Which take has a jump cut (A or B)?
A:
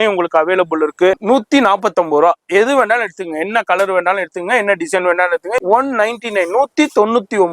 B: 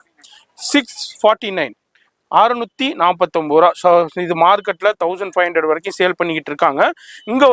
A